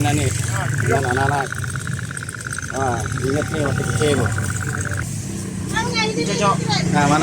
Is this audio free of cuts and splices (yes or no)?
no